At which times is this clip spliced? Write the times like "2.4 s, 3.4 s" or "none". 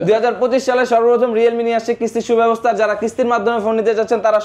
none

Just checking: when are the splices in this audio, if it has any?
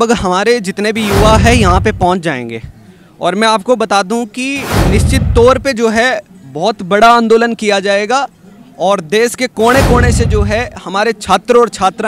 none

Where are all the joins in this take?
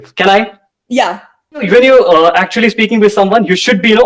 1.7 s

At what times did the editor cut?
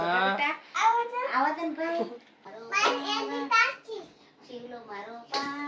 2.6 s

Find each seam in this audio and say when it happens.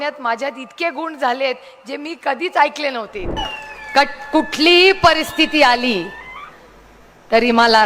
3.4 s

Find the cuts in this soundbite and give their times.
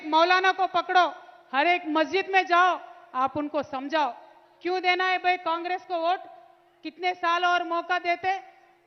none

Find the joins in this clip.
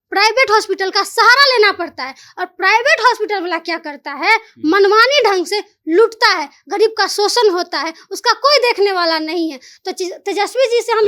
none

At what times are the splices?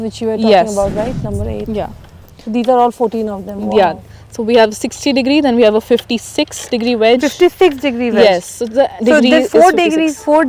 none

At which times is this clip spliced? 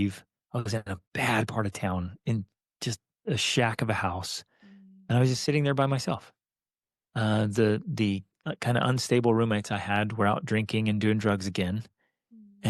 1.0 s

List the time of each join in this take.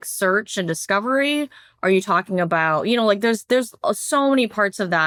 none

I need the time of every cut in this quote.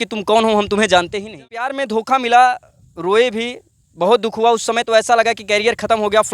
1.7 s

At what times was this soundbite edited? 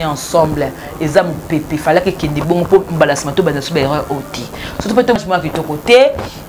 5.2 s

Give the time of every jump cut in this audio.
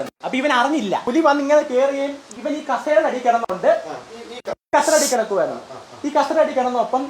1.0 s, 2.3 s

